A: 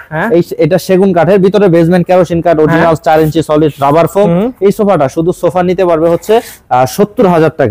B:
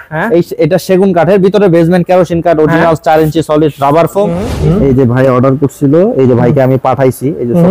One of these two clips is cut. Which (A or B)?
B